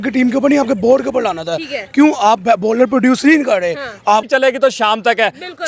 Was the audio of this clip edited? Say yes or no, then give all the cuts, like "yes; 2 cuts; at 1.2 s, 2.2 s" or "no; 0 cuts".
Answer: yes; 1 cut; at 4.3 s